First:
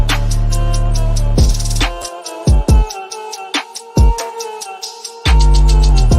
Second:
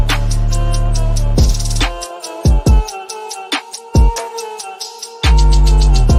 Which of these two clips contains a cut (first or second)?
first